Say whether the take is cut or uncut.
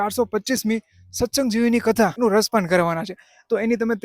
cut